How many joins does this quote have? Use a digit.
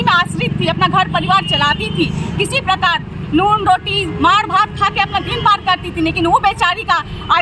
0